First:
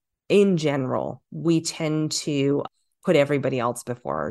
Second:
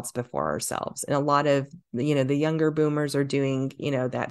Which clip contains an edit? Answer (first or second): first